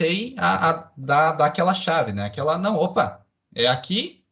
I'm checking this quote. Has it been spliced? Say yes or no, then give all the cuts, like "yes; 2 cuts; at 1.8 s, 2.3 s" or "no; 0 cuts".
no; 0 cuts